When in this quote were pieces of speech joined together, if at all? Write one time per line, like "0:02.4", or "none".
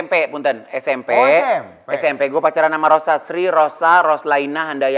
none